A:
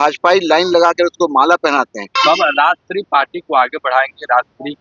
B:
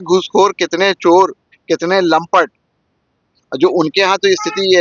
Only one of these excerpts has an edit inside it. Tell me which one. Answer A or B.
A